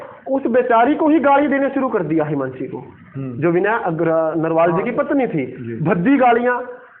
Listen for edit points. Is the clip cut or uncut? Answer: uncut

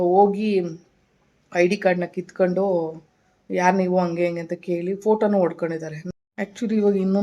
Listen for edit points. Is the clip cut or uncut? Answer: cut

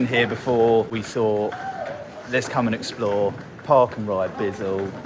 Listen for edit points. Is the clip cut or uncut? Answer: cut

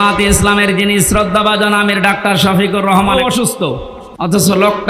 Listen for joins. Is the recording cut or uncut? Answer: cut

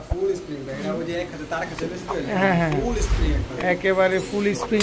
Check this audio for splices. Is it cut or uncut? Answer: uncut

